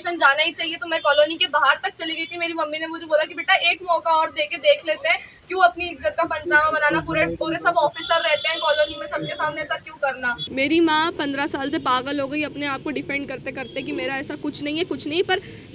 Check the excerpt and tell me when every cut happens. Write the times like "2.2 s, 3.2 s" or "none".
10.4 s